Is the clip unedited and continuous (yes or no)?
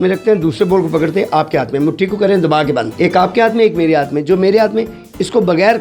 yes